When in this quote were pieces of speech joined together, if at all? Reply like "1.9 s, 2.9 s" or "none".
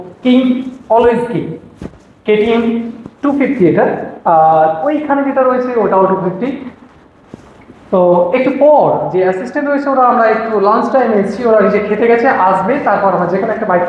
none